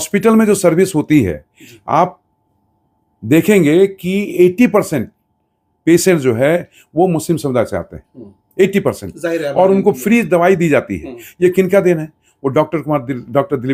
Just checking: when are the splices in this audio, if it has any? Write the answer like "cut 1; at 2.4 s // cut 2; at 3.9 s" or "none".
none